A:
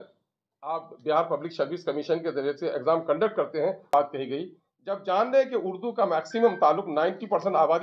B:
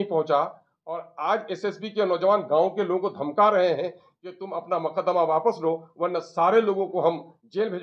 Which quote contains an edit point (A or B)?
A